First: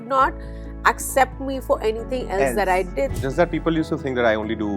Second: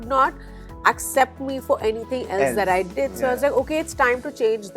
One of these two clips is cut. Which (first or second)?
first